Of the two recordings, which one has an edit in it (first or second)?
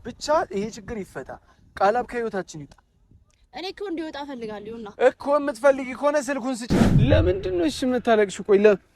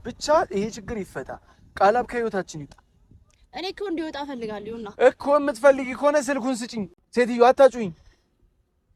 first